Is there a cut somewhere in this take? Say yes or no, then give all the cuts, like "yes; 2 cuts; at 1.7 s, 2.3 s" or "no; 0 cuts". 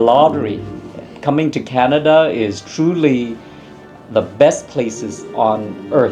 no; 0 cuts